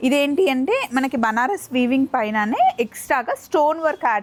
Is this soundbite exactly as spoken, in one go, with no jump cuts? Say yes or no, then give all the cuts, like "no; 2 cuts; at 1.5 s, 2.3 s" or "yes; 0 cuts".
yes; 0 cuts